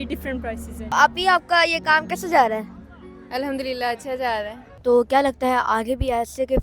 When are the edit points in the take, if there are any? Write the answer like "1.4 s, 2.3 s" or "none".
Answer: 0.9 s, 4.6 s